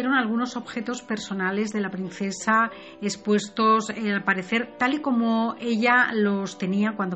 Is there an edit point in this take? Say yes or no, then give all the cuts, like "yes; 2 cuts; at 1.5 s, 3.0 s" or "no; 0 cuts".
yes; 1 cut; at 2.8 s